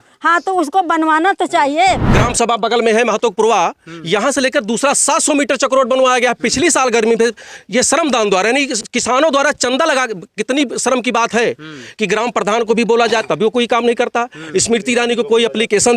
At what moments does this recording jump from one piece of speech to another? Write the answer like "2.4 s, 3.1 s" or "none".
2.0 s